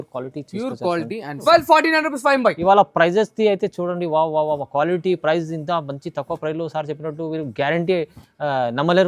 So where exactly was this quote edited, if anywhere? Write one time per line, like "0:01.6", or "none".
0:01.4